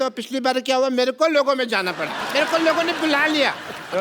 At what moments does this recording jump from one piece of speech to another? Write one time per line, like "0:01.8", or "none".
0:02.2